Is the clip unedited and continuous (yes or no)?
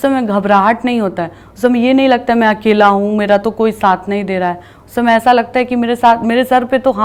yes